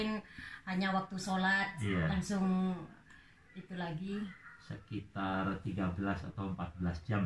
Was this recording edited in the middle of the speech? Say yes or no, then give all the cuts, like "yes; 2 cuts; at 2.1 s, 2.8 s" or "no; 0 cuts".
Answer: no; 0 cuts